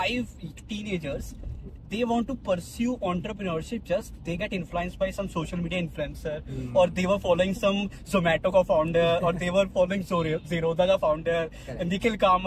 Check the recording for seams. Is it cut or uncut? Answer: uncut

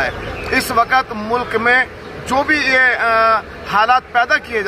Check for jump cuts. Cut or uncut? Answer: uncut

